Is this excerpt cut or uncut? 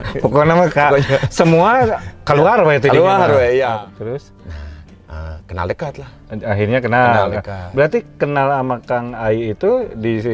cut